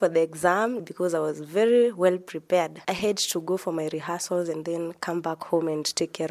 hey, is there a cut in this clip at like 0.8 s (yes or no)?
yes